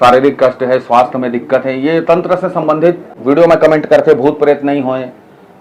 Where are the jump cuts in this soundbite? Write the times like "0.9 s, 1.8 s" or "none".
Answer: 3.2 s